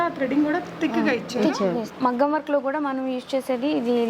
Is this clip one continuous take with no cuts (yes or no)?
no